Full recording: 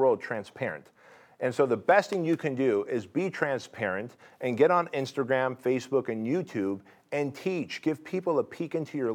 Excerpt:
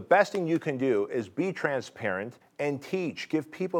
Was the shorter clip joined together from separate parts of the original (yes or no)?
yes